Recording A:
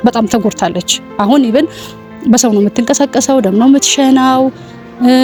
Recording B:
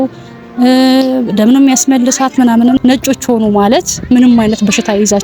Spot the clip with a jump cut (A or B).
B